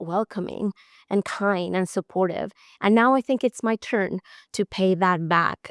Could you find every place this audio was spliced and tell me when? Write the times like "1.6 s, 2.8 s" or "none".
none